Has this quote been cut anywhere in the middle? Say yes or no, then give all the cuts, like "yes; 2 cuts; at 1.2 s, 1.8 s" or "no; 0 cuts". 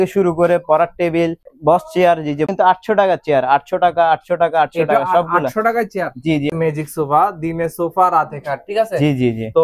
yes; 3 cuts; at 1.4 s, 2.5 s, 6.5 s